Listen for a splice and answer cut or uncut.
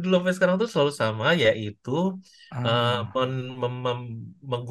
uncut